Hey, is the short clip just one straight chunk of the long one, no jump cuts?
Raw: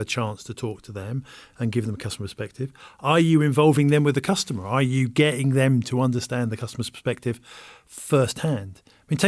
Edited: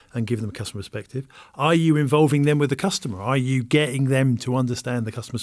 yes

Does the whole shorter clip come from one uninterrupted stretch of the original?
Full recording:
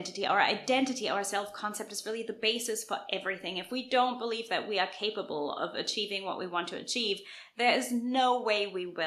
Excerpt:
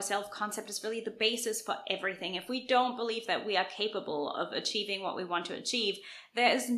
yes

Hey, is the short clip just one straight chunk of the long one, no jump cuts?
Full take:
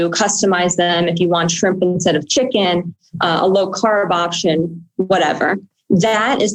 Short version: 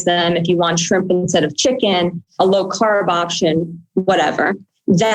no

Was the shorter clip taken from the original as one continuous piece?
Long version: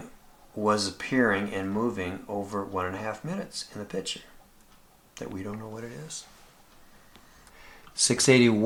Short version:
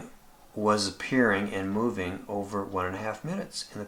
yes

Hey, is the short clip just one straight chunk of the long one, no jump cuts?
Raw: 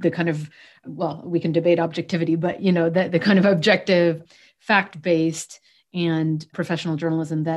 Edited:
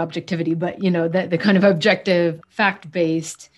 no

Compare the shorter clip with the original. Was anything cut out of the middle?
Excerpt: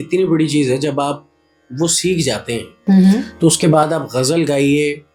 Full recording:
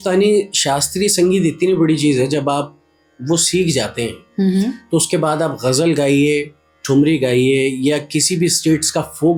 no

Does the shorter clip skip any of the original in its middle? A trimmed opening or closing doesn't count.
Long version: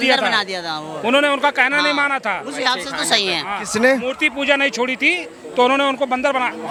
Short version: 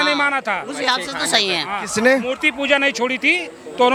no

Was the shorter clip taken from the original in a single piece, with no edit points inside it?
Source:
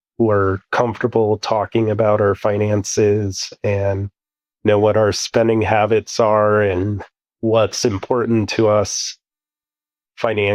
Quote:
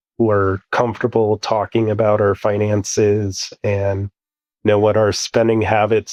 yes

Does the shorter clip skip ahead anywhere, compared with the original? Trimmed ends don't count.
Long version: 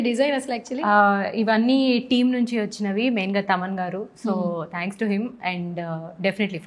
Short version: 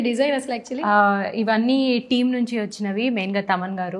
no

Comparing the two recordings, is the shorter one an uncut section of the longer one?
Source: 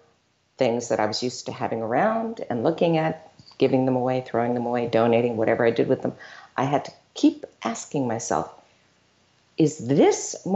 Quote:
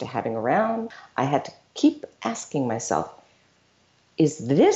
no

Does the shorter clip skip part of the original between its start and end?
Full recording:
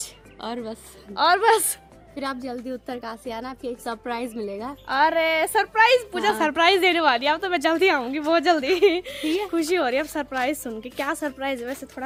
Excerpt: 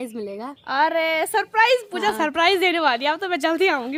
no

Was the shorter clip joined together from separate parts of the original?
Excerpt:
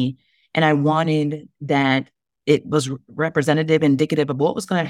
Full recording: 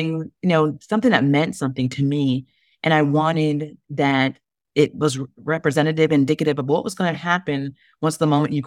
no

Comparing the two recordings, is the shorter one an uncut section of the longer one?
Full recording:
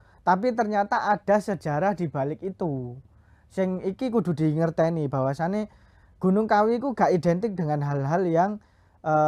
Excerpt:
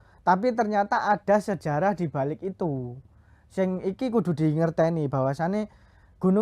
yes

